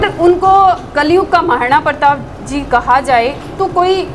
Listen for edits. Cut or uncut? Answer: uncut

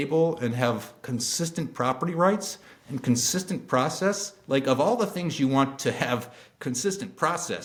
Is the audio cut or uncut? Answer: uncut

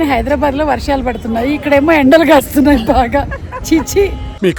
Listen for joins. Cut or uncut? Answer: uncut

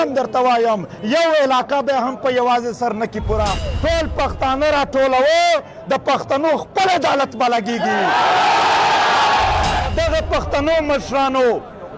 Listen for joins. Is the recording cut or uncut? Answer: cut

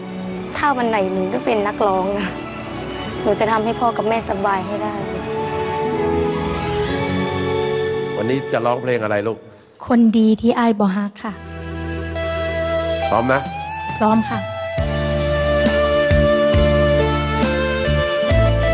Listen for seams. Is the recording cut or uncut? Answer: uncut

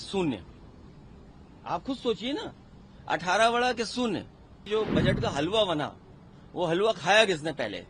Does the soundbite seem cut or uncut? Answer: cut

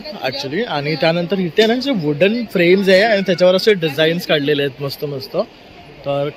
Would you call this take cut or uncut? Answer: uncut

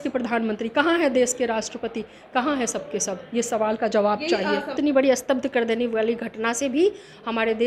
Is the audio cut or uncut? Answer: cut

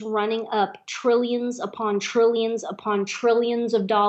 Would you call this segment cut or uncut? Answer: uncut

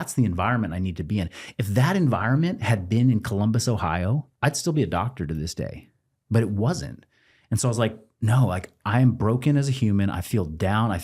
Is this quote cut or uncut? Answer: cut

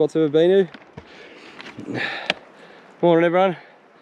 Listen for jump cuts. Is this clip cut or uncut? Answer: uncut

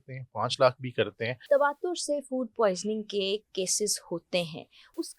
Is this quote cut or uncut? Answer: cut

